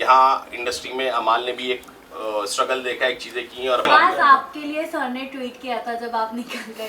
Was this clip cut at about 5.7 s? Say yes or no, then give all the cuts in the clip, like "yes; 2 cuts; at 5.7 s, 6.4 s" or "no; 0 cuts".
no; 1 cut; at 3.9 s